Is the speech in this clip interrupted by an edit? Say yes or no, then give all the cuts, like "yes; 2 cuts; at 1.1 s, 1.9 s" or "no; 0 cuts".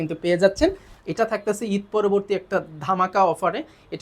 yes; 1 cut; at 0.9 s